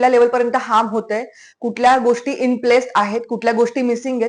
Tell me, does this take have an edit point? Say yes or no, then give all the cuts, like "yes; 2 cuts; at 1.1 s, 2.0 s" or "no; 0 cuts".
no; 0 cuts